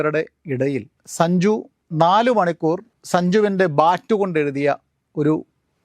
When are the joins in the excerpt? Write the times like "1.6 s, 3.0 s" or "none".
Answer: 1.8 s, 2.9 s